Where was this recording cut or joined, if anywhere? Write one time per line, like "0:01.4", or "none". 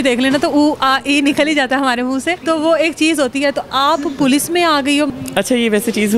0:02.3
0:05.1